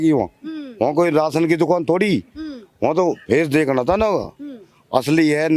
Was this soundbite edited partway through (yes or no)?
no